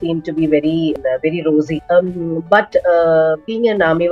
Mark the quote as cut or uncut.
cut